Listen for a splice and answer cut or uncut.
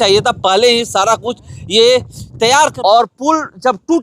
cut